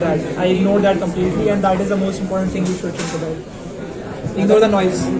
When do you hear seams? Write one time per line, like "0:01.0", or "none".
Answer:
none